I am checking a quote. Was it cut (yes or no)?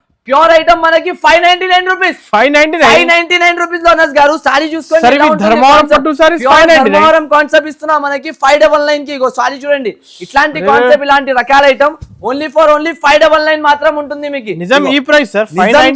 no